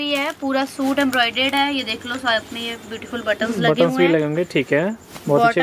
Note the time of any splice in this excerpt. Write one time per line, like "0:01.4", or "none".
none